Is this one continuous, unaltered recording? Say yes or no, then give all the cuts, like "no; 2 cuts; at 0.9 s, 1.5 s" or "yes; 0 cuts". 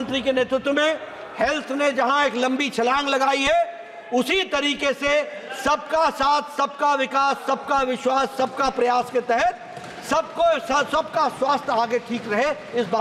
yes; 0 cuts